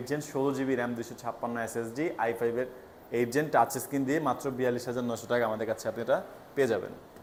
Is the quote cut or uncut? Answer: uncut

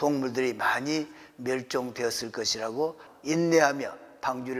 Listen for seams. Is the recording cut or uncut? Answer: cut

